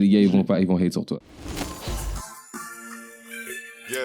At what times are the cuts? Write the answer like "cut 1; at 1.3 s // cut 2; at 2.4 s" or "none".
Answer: cut 1; at 1.2 s